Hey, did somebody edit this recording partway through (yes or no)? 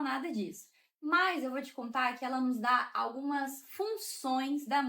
no